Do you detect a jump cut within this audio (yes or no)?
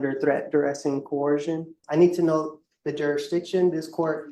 yes